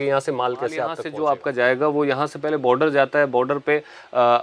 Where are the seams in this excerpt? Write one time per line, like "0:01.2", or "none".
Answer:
0:01.0